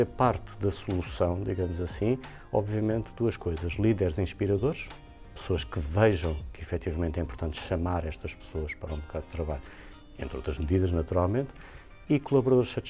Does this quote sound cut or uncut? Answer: uncut